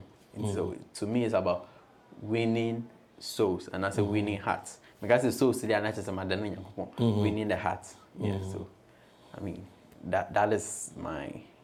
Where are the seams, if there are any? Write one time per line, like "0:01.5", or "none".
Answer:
none